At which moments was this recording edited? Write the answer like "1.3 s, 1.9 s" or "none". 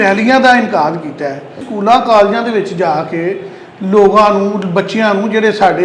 1.6 s